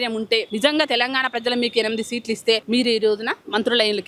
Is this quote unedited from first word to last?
yes; 0 cuts

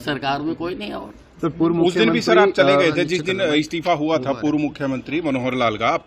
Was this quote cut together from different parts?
no; 0 cuts

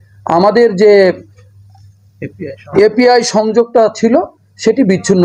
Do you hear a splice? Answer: no; 0 cuts

